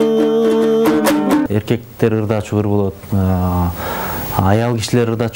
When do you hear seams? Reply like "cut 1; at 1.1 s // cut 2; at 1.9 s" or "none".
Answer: cut 1; at 1.5 s